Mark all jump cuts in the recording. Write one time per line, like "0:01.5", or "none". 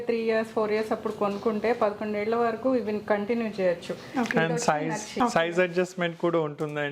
none

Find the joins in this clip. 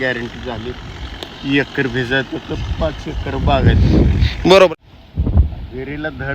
0:04.7

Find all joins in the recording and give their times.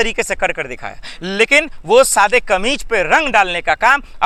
none

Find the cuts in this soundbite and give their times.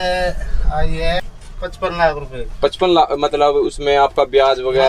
0:01.3

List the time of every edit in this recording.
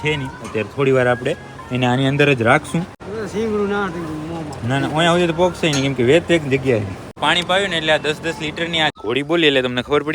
0:02.9
0:07.2
0:09.0

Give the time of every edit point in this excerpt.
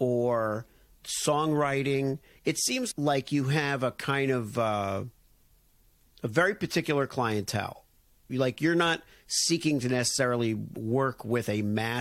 0:02.9

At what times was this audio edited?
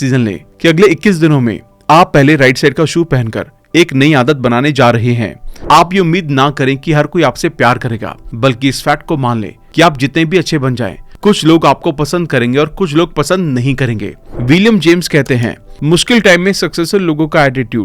0:05.5
0:14.2

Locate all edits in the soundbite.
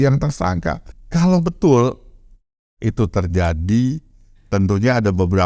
0:00.9

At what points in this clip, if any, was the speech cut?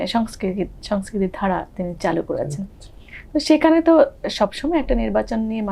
none

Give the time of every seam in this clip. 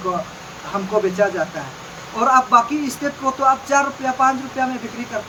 none

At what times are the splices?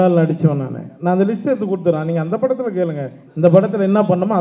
none

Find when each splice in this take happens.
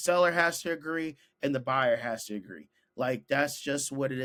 none

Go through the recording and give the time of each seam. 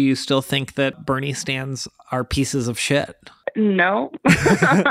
0:00.9
0:03.4

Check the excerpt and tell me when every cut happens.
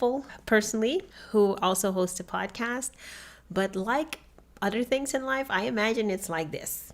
0:01.2

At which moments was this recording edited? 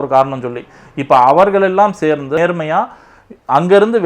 0:02.4

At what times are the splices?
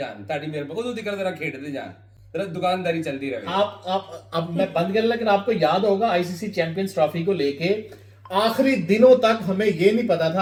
none

